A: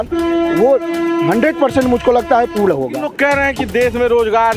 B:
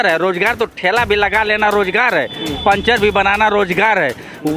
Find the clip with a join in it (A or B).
A